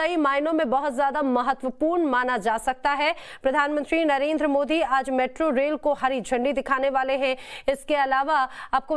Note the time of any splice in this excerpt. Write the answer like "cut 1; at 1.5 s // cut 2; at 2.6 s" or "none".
cut 1; at 4.2 s